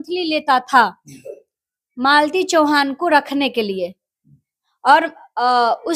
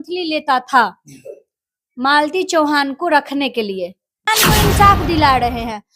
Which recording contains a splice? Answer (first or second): second